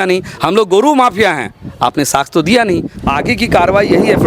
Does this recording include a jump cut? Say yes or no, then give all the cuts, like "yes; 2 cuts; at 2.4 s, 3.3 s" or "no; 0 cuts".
yes; 1 cut; at 2.9 s